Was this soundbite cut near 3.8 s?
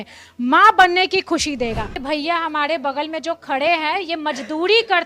no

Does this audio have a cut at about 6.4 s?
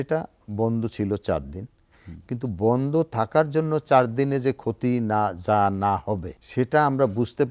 yes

